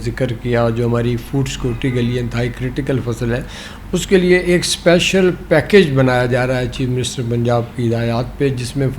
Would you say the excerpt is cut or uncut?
uncut